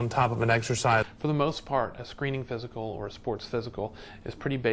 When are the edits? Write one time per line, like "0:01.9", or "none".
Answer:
0:01.1